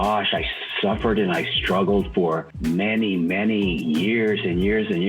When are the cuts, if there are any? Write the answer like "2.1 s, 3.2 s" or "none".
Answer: none